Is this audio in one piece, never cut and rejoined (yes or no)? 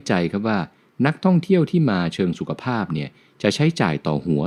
yes